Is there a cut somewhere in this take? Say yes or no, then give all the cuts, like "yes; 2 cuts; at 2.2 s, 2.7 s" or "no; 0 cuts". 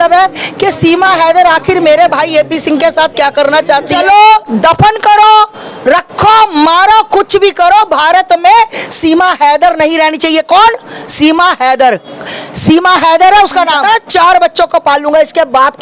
yes; 2 cuts; at 3.9 s, 13.8 s